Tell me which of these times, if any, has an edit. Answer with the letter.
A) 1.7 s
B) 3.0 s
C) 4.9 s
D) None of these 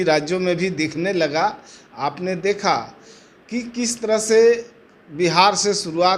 D